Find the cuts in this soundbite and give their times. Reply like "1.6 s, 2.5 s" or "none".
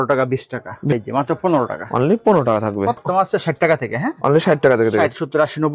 0.9 s, 3.0 s